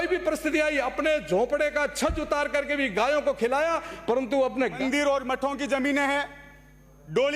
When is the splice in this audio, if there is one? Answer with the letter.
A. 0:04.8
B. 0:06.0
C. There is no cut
A